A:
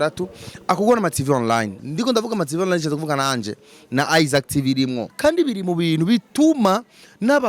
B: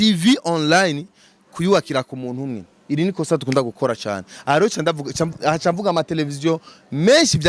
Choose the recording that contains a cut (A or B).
A